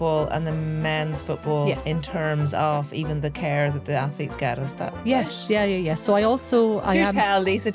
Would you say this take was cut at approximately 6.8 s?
no; 0 cuts

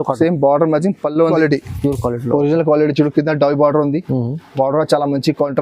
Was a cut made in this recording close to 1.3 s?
yes; 1 cut; at 1.3 s

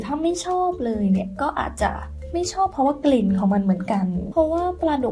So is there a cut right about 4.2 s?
yes; 2 cuts; at 2.1 s, 4.2 s

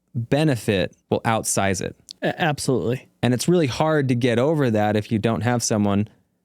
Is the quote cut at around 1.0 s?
yes; 3 cuts; at 1.0 s, 2.0 s, 3.1 s

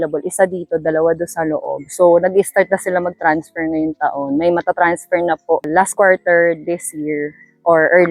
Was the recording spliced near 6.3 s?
no; 0 cuts

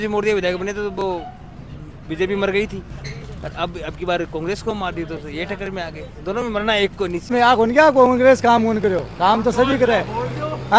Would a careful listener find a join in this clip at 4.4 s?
no; 1 cut; at 7.3 s

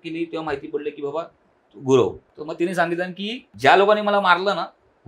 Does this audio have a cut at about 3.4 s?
yes; 2 cuts; at 2.3 s, 3.4 s

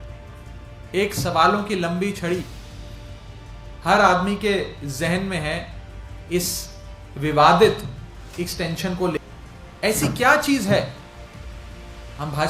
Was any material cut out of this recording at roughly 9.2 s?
yes; 1 cut; at 9.2 s

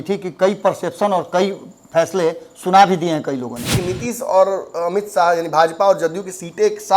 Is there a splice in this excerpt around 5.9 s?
no; 1 cut; at 3.8 s

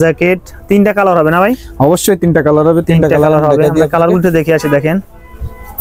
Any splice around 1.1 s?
no; 0 cuts

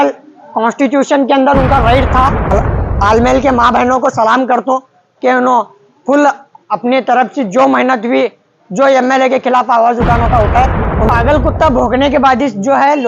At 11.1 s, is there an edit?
yes; 2 cuts; at 2.5 s, 11.1 s

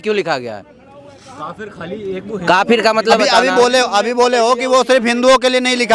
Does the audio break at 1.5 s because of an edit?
no; 1 cut; at 3.2 s

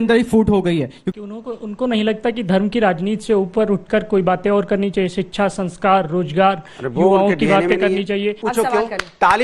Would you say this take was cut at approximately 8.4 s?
yes; 2 cuts; at 1.0 s, 8.4 s

